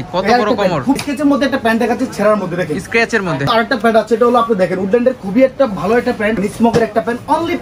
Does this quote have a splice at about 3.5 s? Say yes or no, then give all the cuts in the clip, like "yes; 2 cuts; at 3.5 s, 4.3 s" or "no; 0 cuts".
yes; 3 cuts; at 1.0 s, 3.5 s, 6.4 s